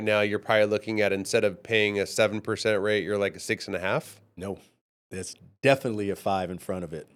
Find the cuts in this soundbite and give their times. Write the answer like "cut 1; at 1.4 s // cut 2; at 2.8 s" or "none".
none